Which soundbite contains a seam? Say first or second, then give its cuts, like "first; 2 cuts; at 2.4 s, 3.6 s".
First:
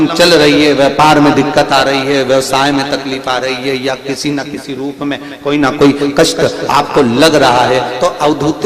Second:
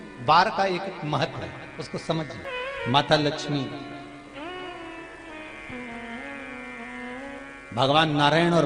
second; 1 cut; at 2.4 s